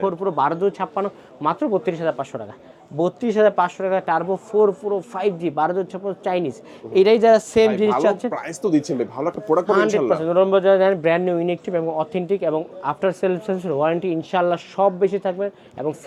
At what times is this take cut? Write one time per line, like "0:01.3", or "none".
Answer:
none

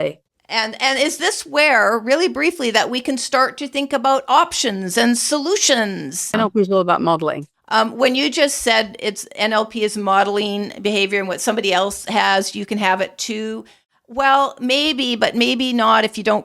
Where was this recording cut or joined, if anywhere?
0:06.3
0:07.5

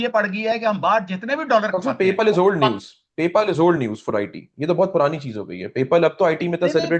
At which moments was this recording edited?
none

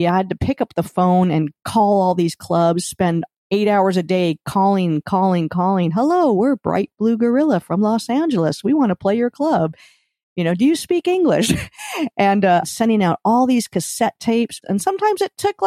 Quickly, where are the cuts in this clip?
0:12.6
0:14.6

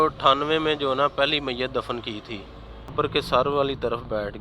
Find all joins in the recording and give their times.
0:02.9

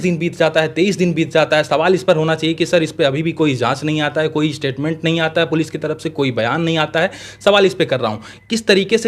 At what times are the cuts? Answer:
none

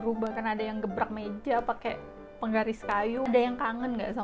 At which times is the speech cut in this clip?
0:03.3

